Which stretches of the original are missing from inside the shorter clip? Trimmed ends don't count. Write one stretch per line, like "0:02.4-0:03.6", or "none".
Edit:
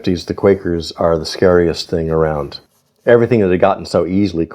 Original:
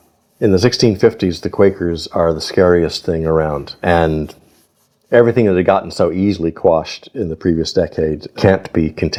0:03.7-0:04.6